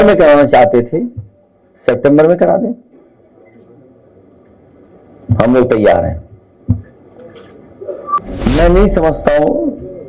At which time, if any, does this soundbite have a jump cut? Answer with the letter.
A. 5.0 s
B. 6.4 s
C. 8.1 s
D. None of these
C